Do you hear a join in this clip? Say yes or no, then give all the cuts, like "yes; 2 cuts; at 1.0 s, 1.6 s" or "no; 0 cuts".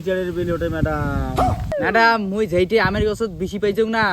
yes; 1 cut; at 1.7 s